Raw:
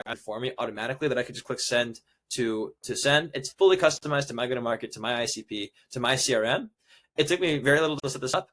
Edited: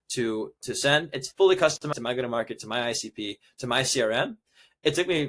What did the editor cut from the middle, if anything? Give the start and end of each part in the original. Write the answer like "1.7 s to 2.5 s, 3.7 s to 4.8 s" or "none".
4.1 s to 4.2 s